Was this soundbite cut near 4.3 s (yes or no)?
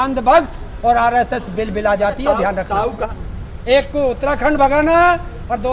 no